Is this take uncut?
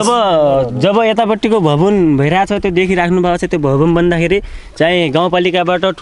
yes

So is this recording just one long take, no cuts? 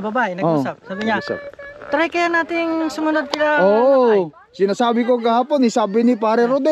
yes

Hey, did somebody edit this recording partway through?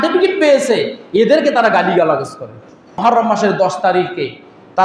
yes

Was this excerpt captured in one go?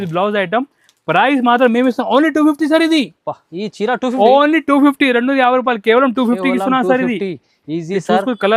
yes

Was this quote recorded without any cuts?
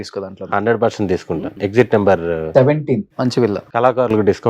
no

